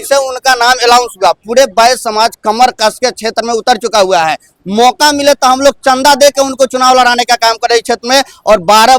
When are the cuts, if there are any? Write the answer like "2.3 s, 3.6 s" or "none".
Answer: none